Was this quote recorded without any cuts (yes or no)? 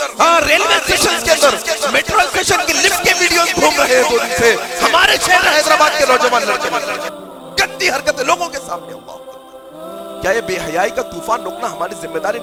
yes